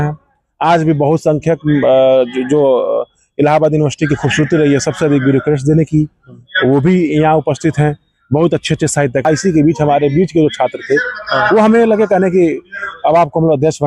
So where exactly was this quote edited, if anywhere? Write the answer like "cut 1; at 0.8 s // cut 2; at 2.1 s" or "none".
cut 1; at 9.2 s